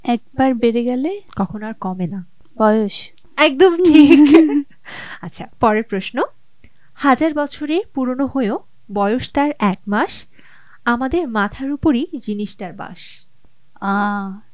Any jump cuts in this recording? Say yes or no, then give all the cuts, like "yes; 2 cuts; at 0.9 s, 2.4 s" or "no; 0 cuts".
no; 0 cuts